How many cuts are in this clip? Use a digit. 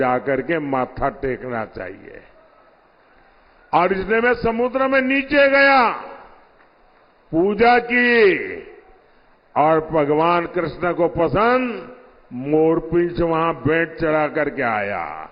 0